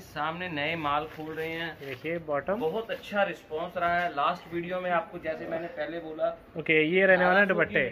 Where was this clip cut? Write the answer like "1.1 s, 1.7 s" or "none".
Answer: none